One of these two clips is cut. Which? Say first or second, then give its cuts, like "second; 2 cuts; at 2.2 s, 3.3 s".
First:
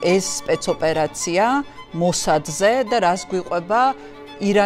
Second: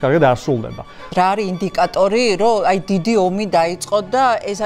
second; 1 cut; at 1.0 s